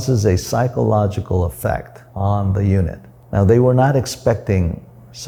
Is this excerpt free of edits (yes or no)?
yes